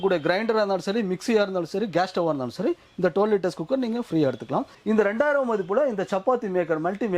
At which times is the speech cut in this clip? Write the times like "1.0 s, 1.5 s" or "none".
4.7 s